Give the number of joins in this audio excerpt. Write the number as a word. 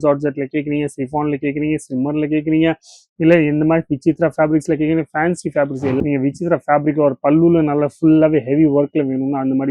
one